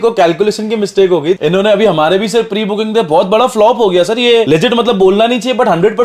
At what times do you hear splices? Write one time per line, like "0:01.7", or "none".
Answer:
none